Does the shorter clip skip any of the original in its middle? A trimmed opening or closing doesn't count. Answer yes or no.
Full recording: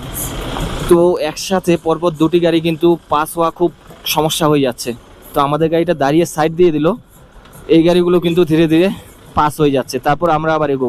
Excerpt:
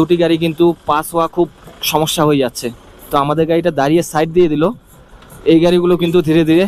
no